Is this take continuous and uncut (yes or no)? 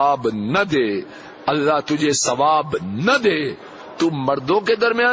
yes